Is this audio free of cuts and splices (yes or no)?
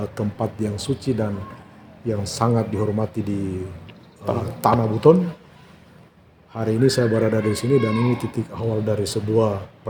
yes